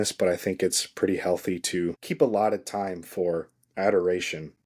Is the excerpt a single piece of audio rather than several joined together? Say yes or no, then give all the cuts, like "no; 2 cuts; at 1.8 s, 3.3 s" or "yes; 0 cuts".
no; 1 cut; at 2.0 s